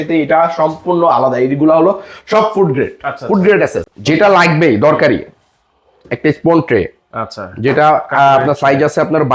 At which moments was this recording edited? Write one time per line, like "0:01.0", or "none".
0:03.9